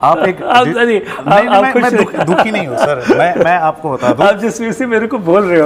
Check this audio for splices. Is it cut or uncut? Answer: uncut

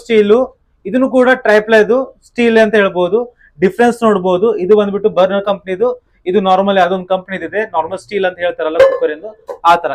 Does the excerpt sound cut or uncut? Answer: uncut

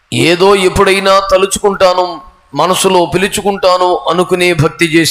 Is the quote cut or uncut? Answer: uncut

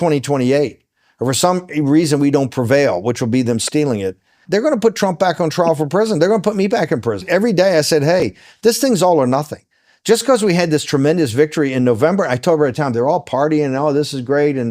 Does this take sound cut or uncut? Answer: cut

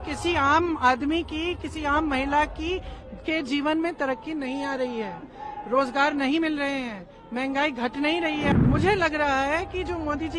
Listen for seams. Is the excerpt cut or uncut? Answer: cut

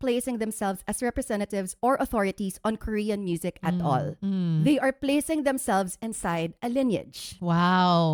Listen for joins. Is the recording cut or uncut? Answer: uncut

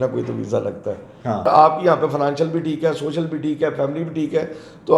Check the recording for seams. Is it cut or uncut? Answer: cut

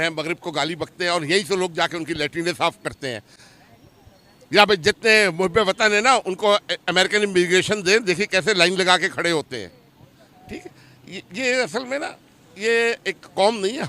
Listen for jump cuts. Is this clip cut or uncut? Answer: uncut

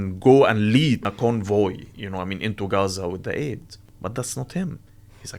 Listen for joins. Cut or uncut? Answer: cut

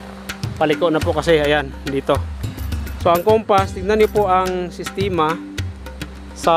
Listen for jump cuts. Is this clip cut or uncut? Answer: uncut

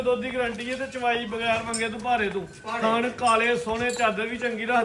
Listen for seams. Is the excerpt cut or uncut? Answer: uncut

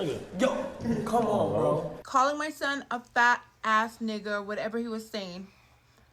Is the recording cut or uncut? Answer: cut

